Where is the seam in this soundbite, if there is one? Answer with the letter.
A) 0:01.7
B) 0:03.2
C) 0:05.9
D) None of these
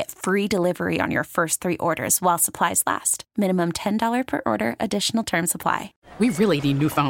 C